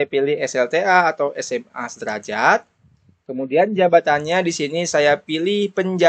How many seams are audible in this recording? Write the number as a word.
zero